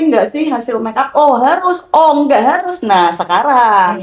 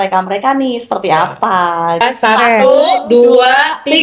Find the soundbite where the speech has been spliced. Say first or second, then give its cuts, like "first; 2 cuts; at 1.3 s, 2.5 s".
second; 1 cut; at 2.0 s